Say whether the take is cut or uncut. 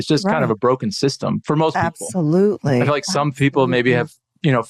uncut